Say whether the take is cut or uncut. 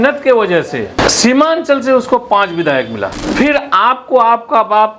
cut